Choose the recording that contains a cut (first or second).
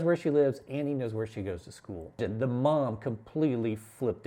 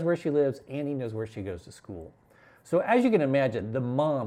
first